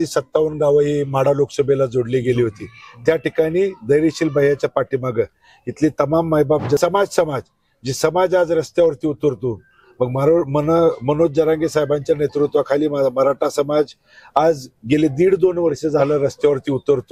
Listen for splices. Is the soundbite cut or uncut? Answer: cut